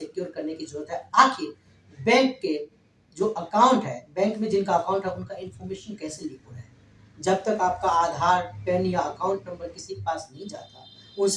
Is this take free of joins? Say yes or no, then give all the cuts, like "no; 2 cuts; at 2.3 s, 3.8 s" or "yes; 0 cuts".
yes; 0 cuts